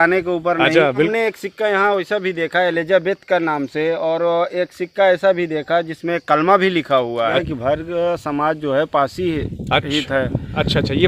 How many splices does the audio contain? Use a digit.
2